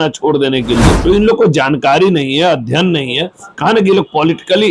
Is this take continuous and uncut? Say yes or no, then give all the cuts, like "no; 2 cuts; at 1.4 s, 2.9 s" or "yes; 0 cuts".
no; 1 cut; at 1.0 s